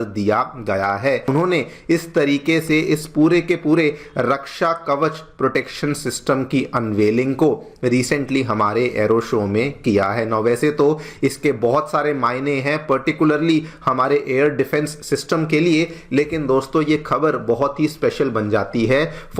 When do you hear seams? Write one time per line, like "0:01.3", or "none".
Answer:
none